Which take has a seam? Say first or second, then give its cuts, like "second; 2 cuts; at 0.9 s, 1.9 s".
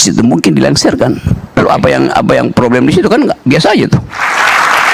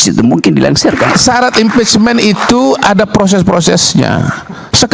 second; 1 cut; at 1.1 s